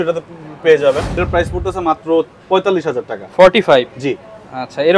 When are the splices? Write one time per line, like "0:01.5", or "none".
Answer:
0:01.2